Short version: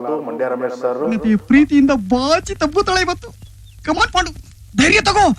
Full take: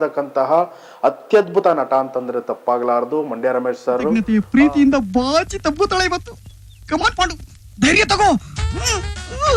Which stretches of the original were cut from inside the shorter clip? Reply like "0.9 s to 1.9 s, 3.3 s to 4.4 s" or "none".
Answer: none